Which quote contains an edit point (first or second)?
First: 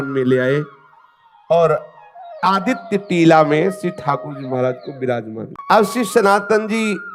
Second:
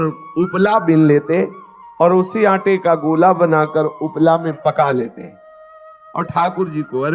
first